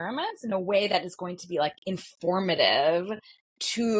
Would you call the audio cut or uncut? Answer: uncut